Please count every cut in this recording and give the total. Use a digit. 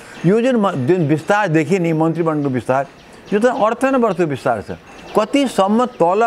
1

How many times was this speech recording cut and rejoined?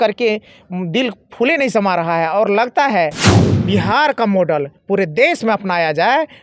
1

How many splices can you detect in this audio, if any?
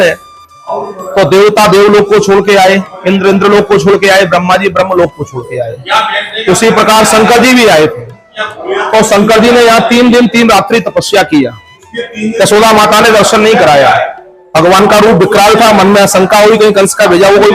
0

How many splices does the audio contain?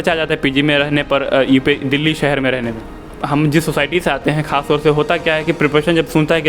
1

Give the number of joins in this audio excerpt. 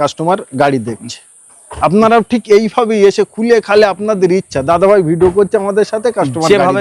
0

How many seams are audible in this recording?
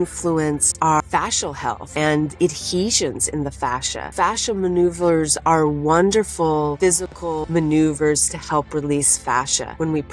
3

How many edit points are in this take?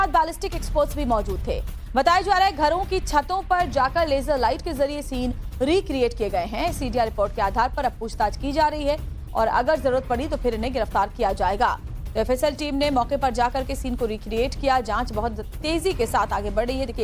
1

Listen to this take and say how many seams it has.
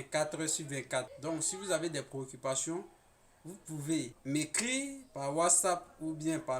2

